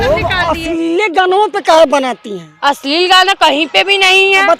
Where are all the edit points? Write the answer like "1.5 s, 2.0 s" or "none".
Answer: none

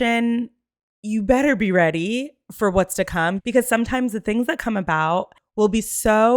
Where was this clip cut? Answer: 5.4 s

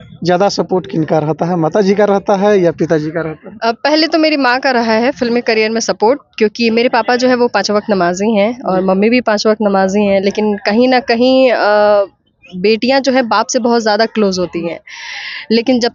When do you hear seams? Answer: none

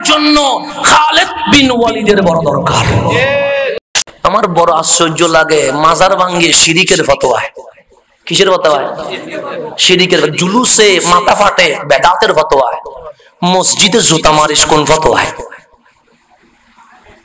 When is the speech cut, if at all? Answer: 3.9 s

